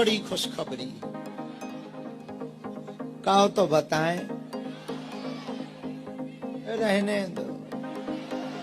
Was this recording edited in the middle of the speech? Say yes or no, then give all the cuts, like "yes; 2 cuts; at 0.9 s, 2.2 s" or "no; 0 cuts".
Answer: yes; 1 cut; at 1.9 s